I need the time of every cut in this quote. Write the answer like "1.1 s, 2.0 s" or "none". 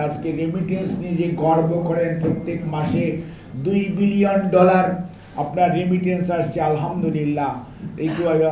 none